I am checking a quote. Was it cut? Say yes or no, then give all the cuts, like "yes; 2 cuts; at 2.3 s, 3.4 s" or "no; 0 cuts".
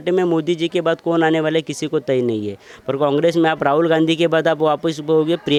no; 0 cuts